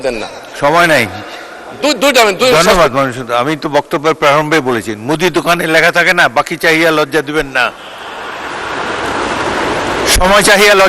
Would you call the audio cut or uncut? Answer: uncut